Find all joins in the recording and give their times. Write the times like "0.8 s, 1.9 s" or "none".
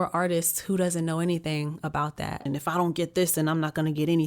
2.4 s